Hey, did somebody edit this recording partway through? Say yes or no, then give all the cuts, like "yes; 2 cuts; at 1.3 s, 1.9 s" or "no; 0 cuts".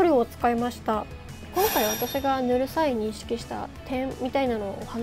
yes; 1 cut; at 1.4 s